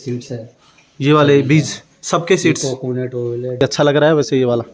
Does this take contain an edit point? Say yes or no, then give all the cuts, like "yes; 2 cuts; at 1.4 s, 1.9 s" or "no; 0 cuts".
yes; 1 cut; at 3.6 s